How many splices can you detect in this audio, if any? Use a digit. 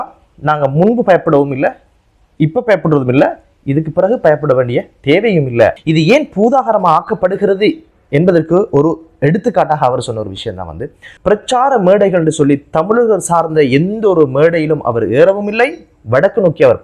2